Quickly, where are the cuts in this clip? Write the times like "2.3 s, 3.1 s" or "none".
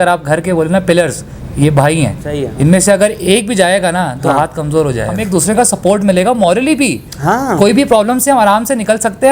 2.5 s, 5.1 s